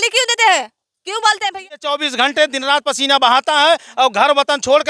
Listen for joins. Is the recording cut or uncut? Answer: cut